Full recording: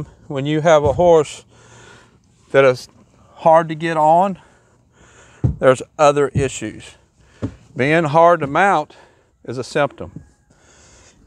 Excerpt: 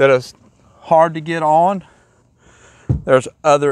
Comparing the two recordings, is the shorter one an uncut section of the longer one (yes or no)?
yes